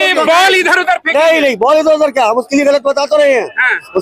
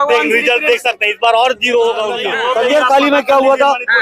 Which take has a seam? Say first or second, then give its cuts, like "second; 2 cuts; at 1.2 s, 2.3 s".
second; 1 cut; at 2.2 s